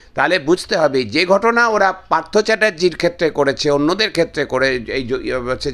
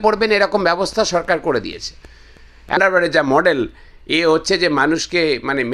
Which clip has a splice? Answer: second; 1 cut; at 2.8 s

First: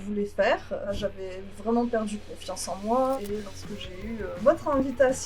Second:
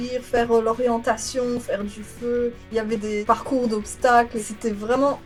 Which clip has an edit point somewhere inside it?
first; 2 cuts; at 1.0 s, 3.2 s

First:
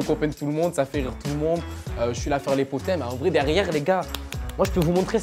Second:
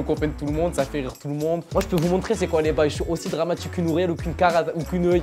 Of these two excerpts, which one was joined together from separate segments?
second; 1 cut; at 1.6 s

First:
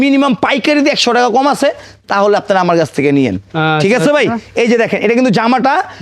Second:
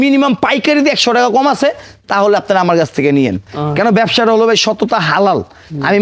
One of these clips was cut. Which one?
second; 1 cut; at 3.5 s

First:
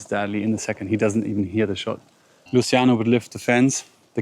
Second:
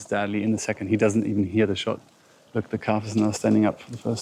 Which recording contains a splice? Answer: first; 1 cut; at 2.3 s

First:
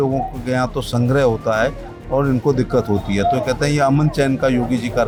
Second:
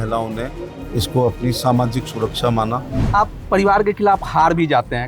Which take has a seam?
second; 1 cut; at 3.0 s

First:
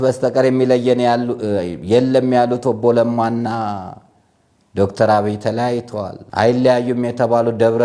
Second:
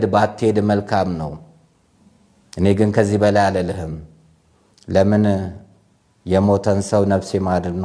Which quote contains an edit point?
first; 1 cut; at 6.2 s

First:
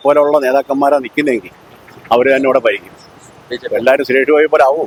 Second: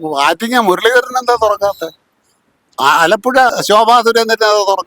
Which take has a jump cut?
second; 1 cut; at 3.5 s

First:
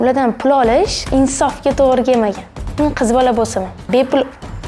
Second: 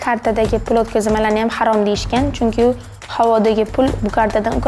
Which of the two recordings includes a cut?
first; 2 cuts; at 1.0 s, 3.9 s

